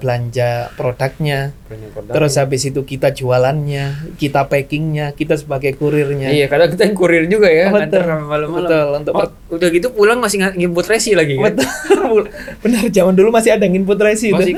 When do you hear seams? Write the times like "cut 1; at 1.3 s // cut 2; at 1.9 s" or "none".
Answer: none